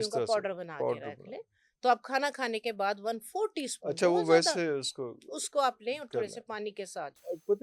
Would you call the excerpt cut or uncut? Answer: uncut